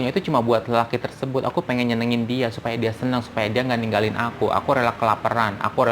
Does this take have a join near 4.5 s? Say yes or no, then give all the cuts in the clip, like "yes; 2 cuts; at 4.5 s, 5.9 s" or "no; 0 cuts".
no; 0 cuts